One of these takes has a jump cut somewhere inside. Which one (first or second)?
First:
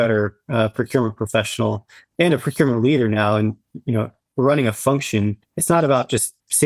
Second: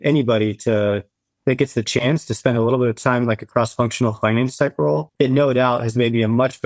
second